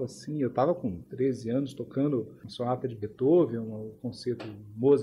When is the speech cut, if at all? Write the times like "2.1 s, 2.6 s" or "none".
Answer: 1.0 s, 2.4 s